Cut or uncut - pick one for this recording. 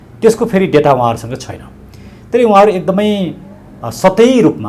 uncut